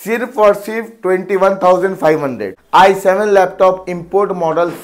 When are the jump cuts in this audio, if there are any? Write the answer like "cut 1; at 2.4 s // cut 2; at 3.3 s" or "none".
cut 1; at 2.5 s